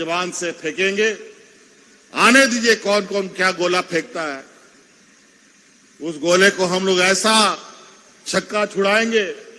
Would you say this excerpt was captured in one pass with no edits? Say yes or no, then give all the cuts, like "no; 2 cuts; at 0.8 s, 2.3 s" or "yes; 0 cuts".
yes; 0 cuts